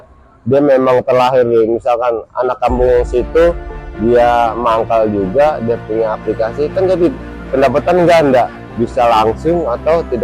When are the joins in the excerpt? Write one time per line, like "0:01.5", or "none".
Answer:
none